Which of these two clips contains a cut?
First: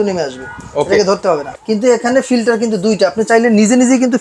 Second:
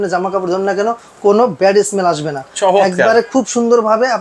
first; 1 cut; at 1.5 s

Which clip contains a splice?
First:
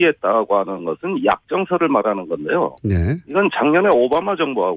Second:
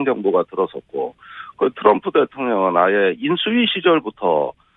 second; 1 cut; at 3.8 s

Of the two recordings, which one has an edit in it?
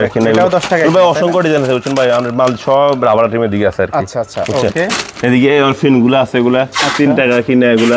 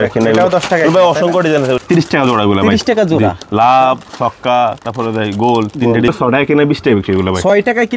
second; 2 cuts; at 1.8 s, 6.1 s

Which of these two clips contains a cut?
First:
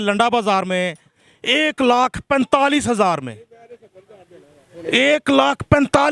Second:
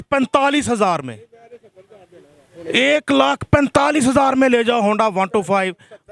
first; 1 cut; at 1.2 s

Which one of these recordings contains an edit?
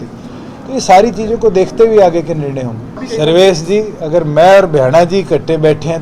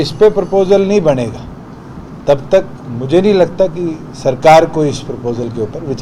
first; 1 cut; at 3.0 s

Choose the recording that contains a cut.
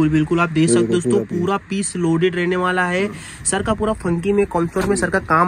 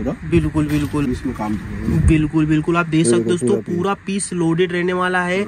second; 1 cut; at 1.1 s

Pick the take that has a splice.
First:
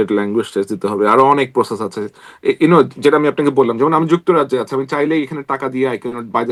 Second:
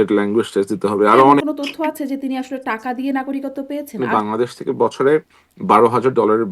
second; 2 cuts; at 1.4 s, 3.9 s

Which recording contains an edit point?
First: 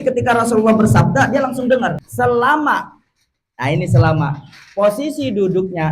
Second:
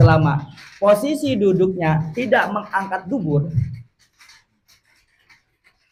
first; 1 cut; at 2.0 s

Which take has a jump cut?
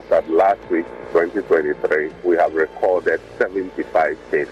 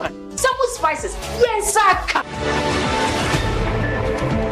first; 2 cuts; at 2.1 s, 3.3 s

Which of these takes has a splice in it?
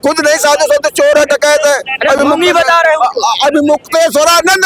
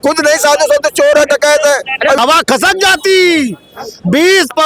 second; 1 cut; at 2.2 s

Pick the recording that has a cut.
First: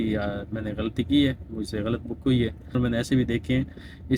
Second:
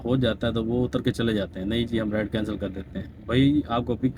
first; 1 cut; at 2.8 s

